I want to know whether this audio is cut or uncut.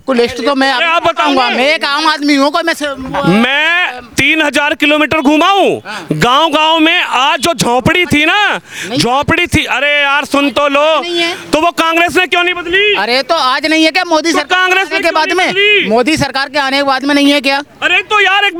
uncut